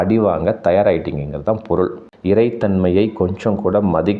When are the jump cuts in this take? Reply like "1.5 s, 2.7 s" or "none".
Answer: 2.1 s